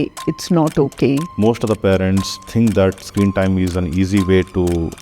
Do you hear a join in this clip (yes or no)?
yes